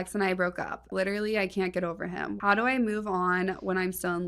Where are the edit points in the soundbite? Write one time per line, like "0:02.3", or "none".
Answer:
0:00.9
0:02.3